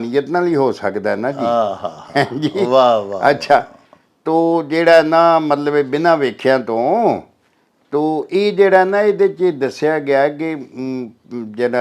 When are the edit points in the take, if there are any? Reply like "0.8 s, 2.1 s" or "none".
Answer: none